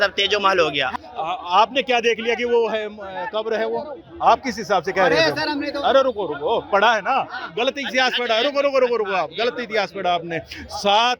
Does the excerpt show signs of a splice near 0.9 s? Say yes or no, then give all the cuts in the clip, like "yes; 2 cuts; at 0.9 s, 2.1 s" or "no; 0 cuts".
yes; 1 cut; at 0.9 s